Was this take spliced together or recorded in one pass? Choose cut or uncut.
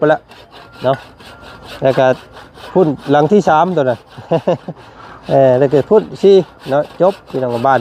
uncut